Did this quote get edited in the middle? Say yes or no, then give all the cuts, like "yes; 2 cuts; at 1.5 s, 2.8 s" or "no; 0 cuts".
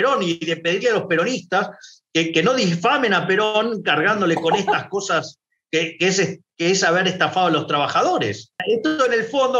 yes; 1 cut; at 8.5 s